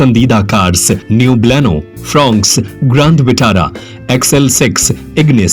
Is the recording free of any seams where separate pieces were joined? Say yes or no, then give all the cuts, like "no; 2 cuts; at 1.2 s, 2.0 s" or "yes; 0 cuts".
no; 1 cut; at 1.0 s